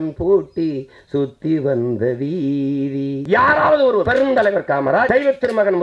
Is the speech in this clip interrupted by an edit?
yes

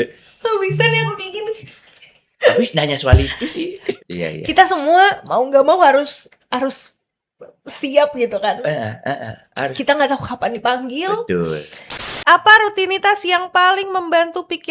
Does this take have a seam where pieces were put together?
yes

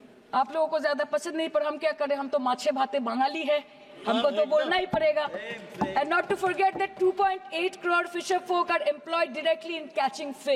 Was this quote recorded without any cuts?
yes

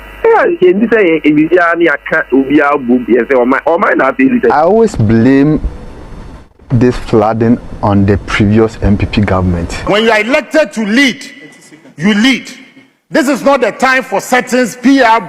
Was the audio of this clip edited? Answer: yes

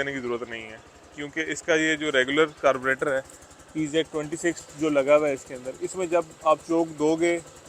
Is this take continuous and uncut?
yes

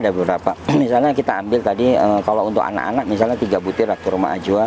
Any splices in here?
no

